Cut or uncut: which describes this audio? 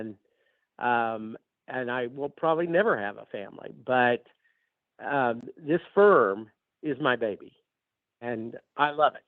cut